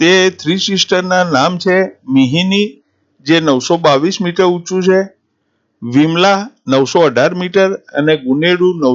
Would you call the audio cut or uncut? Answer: uncut